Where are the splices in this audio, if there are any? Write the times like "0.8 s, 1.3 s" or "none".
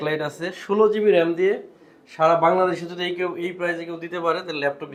none